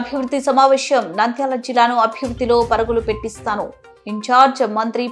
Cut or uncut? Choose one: uncut